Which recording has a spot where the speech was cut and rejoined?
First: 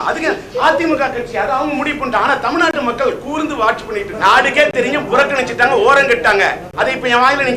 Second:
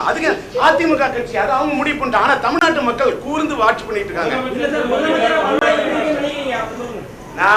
first; 1 cut; at 4.1 s

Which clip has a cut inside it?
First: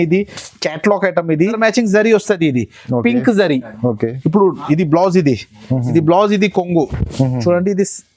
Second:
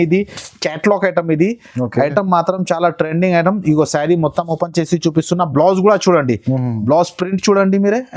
first; 1 cut; at 1.6 s

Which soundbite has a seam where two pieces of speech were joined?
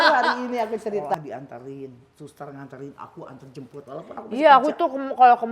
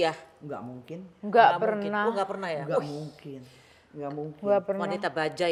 first; 1 cut; at 1.1 s

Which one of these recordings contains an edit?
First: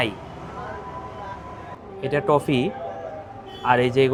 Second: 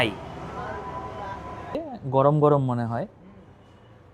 second; 1 cut; at 1.6 s

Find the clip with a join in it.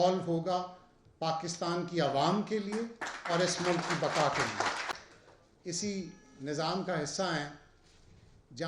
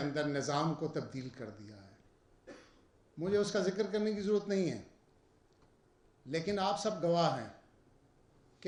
first; 1 cut; at 4.9 s

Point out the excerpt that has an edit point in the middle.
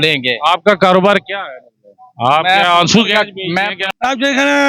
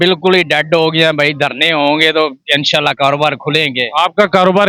first; 1 cut; at 3.7 s

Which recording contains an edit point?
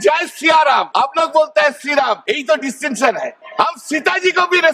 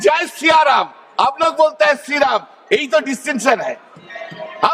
first; 3 cuts; at 0.9 s, 2.2 s, 3.4 s

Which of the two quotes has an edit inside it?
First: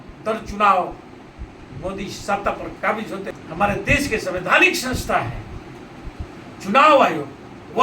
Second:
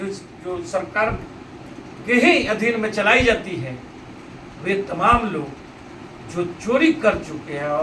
first; 1 cut; at 3.3 s

